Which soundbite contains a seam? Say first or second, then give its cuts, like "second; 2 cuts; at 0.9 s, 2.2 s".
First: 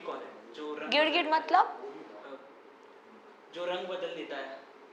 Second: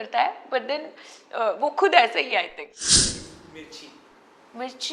second; 1 cut; at 3.0 s